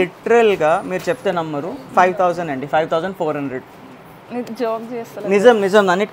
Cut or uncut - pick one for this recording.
uncut